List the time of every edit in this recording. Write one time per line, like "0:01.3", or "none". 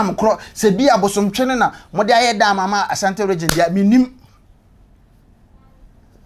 none